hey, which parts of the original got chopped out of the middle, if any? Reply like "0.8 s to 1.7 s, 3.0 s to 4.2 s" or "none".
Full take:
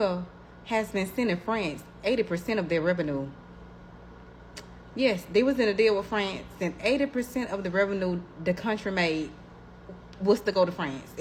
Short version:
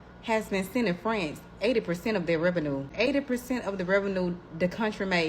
3.3 s to 6.8 s